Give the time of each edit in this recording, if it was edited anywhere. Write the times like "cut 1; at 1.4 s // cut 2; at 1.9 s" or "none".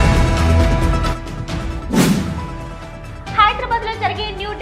cut 1; at 1.3 s